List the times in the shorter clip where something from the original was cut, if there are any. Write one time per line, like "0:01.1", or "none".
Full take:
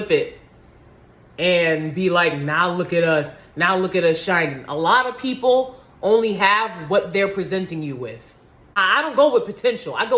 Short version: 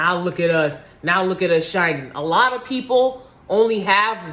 none